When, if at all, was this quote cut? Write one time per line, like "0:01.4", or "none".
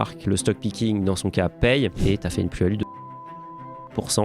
0:02.0